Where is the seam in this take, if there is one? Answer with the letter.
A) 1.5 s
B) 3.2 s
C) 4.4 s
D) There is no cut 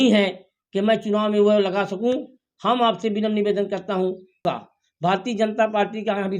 C